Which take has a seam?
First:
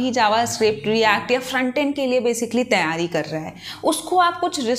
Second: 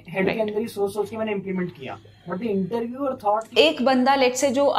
second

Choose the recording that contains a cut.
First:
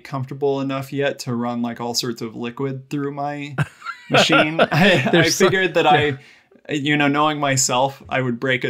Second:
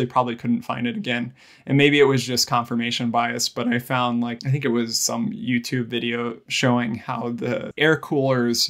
second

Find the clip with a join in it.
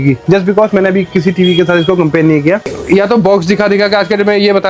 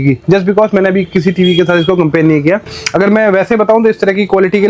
first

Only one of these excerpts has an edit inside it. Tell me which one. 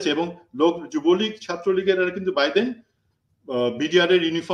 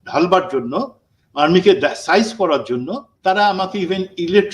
second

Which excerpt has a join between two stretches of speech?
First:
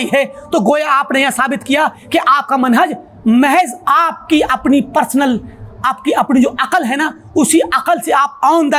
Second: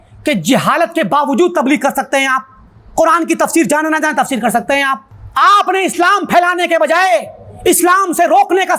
second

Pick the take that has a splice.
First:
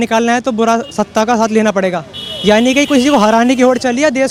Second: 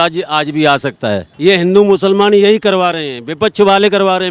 second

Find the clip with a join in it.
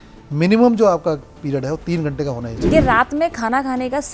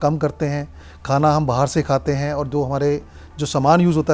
first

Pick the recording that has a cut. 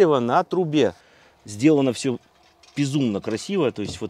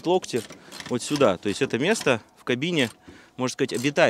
first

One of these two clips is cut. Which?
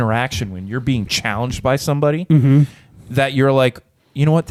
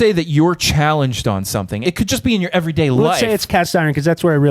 second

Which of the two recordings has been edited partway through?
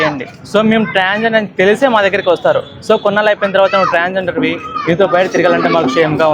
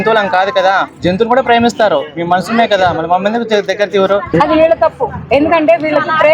second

